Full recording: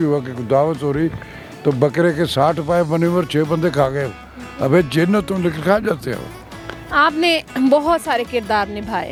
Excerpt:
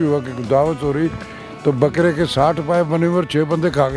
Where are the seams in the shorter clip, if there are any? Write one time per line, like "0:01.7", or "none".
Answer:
none